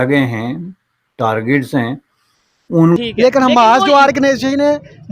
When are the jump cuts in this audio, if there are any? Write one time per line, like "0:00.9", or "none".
0:03.0